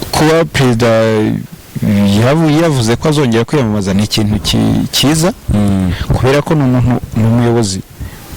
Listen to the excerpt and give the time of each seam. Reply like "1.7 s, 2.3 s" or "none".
none